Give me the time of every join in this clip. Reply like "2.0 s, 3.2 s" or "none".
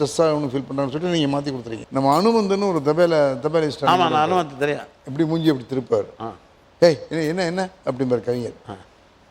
1.7 s